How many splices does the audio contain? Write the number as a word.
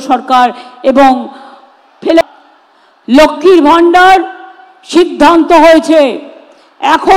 one